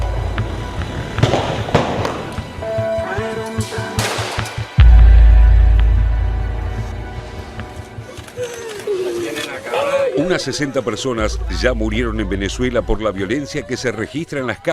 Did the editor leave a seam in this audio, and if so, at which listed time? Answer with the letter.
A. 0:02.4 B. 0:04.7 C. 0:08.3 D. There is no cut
C